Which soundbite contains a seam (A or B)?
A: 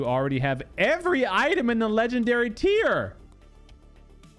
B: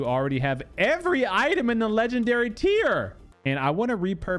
B